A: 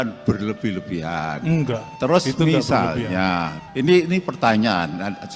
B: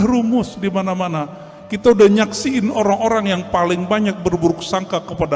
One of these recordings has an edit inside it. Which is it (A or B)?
A